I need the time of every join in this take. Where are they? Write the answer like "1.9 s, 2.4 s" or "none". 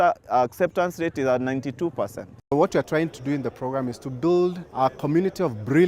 2.5 s, 4.6 s